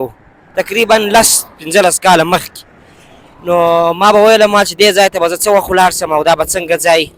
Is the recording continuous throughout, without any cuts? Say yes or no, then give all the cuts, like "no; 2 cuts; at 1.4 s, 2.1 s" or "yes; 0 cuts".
yes; 0 cuts